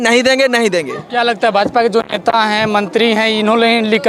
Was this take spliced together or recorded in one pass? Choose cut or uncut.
uncut